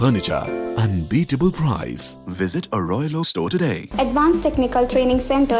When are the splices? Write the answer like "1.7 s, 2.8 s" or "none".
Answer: 3.8 s